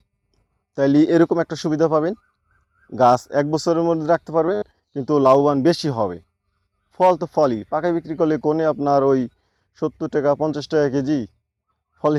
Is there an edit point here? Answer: no; 0 cuts

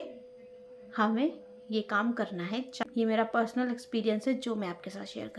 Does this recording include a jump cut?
yes; 1 cut; at 2.8 s

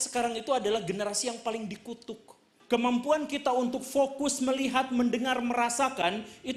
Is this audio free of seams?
no; 1 cut; at 2.5 s

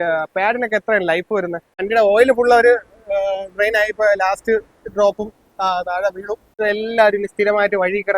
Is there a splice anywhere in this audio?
yes; 2 cuts; at 1.8 s, 6.6 s

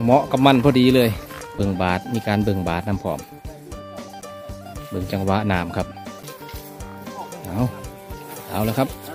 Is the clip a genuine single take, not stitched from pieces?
no; 2 cuts; at 1.6 s, 6.2 s

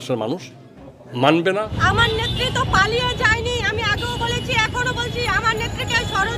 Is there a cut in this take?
yes; 1 cut; at 1.7 s

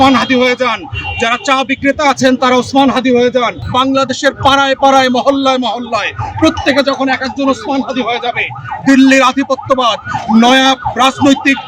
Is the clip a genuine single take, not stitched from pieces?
no; 1 cut; at 3.6 s

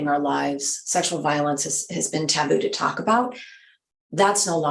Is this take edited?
no; 0 cuts

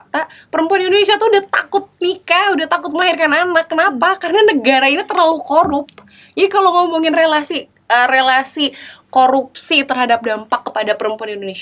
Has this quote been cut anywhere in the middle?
no; 0 cuts

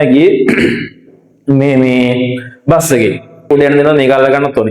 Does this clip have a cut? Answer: yes; 1 cut; at 3.5 s

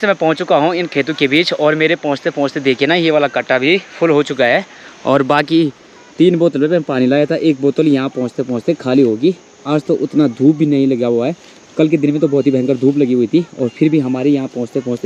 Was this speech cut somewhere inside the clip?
no; 0 cuts

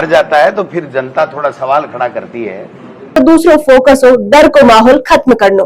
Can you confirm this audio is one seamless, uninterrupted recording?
no; 1 cut; at 3.2 s

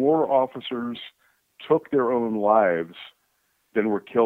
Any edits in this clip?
no; 0 cuts

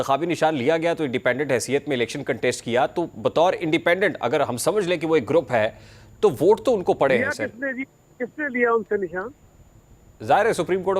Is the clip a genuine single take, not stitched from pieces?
yes; 0 cuts

